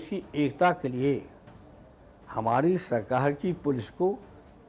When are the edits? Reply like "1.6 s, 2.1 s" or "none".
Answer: none